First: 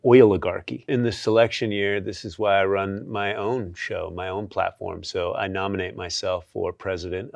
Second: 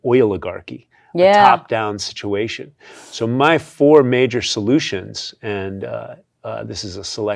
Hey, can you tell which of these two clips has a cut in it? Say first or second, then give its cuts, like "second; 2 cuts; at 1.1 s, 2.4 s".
first; 1 cut; at 0.9 s